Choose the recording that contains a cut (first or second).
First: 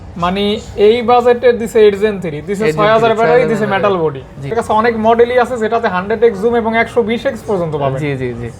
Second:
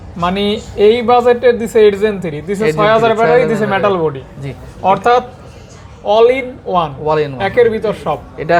first